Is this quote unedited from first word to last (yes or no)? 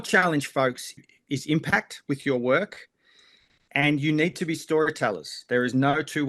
no